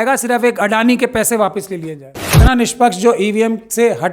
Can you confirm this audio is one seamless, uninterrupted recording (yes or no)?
no